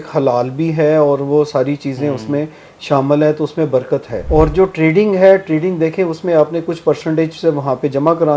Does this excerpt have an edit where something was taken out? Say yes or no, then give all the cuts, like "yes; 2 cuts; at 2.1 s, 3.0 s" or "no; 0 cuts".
yes; 1 cut; at 4.1 s